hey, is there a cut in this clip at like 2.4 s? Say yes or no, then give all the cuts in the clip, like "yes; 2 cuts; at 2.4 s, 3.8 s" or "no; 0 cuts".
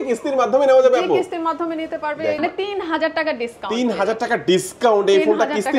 yes; 1 cut; at 2.4 s